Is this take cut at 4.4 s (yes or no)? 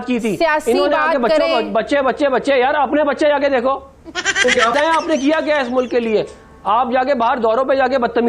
yes